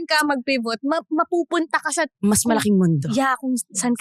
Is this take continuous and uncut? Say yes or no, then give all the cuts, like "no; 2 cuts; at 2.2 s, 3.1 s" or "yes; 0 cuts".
yes; 0 cuts